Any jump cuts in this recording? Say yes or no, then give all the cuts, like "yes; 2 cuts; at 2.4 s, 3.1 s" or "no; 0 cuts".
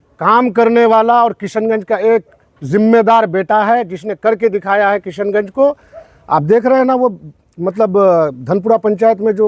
no; 0 cuts